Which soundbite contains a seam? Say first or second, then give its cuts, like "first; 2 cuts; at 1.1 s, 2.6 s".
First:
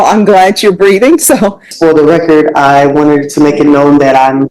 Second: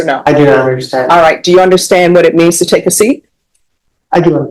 first; 1 cut; at 1.7 s